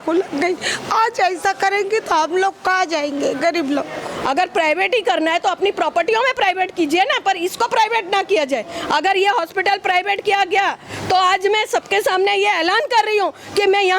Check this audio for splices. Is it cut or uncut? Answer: cut